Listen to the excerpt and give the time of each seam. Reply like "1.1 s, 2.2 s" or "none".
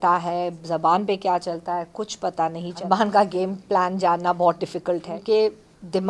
2.8 s, 5.1 s